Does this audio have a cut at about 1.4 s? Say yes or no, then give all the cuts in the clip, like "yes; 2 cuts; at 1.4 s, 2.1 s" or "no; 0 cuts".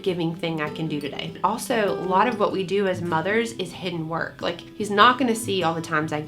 yes; 1 cut; at 1.4 s